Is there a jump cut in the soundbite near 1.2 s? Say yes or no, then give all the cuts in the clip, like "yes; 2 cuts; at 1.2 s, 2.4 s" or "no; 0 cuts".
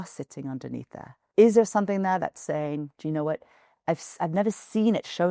yes; 2 cuts; at 1.2 s, 2.9 s